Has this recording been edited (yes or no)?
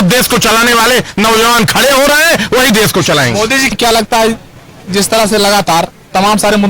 yes